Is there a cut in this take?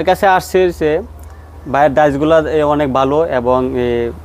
no; 0 cuts

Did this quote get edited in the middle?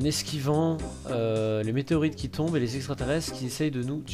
yes; 1 cut; at 2.3 s

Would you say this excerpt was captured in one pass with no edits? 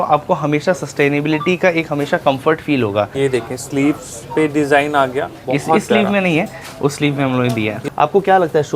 no; 2 cuts; at 3.1 s, 7.8 s

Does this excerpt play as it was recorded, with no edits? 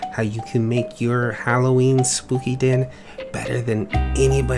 yes; 0 cuts

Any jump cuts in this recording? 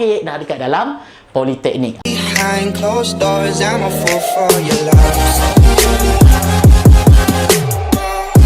yes; 1 cut; at 2.0 s

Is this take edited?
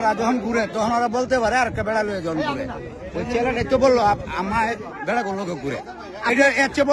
no; 0 cuts

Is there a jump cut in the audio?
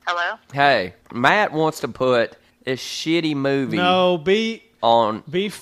yes; 1 cut; at 0.9 s

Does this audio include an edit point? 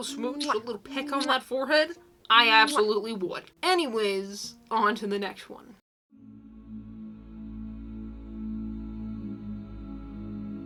no; 0 cuts

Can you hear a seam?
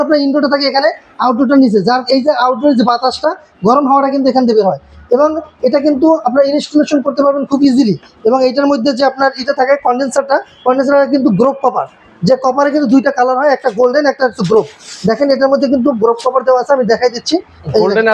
no; 0 cuts

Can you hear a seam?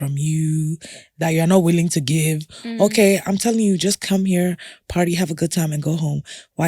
yes; 1 cut; at 1.1 s

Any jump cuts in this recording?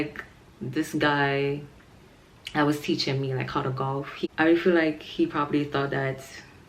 yes; 1 cut; at 4.3 s

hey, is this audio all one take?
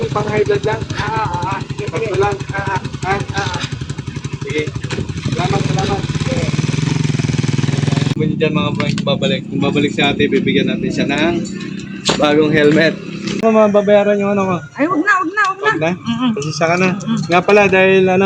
no; 2 cuts; at 8.1 s, 13.4 s

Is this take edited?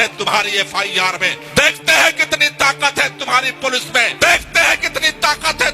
yes; 2 cuts; at 1.3 s, 4.1 s

